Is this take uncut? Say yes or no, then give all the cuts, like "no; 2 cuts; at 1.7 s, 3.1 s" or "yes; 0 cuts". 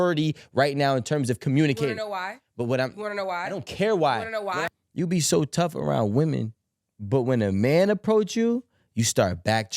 no; 1 cut; at 4.7 s